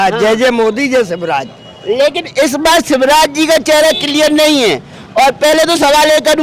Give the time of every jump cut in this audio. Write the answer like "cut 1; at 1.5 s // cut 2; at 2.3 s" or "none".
none